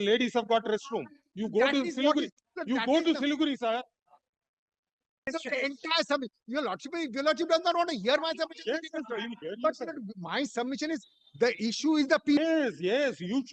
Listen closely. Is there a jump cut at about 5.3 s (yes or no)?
yes